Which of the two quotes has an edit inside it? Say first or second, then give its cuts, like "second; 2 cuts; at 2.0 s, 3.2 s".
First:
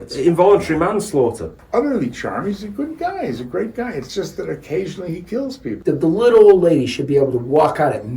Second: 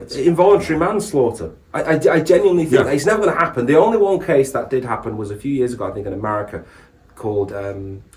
first; 2 cuts; at 1.5 s, 5.7 s